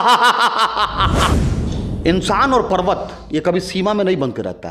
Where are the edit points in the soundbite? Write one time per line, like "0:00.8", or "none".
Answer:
0:01.3